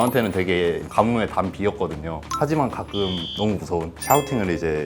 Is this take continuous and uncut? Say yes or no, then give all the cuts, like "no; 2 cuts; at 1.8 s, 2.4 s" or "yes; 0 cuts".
no; 2 cuts; at 2.3 s, 3.9 s